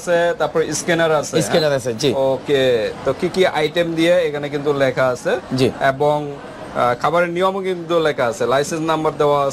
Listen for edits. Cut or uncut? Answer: uncut